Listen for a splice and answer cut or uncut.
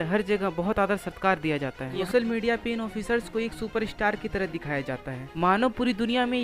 cut